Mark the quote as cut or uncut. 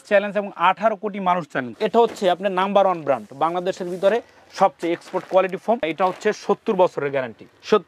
cut